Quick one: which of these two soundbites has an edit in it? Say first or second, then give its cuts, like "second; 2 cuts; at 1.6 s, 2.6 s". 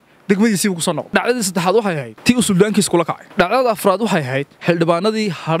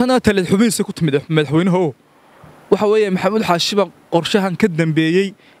first; 4 cuts; at 1.0 s, 2.1 s, 3.2 s, 4.5 s